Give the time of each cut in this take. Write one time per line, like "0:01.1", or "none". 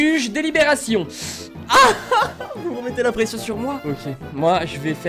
0:01.1
0:03.8